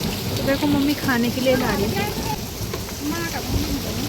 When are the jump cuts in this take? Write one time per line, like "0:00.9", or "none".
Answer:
0:02.4